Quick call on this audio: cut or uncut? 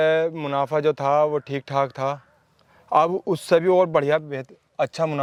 uncut